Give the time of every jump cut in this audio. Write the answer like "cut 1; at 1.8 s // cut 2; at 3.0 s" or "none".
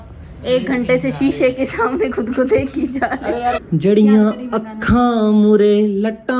cut 1; at 3.7 s